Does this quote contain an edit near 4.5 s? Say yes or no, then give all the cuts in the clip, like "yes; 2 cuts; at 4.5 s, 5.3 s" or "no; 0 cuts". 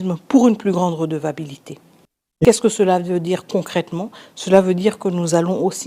no; 1 cut; at 2.4 s